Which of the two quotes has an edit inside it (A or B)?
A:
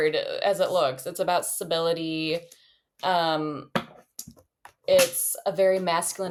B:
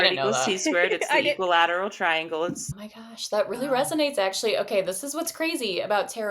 B